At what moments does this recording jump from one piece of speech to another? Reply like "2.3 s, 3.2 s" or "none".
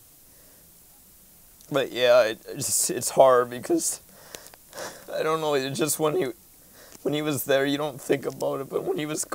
none